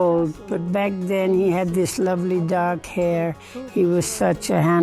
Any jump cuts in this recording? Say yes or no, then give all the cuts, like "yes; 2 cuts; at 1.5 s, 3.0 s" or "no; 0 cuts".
no; 0 cuts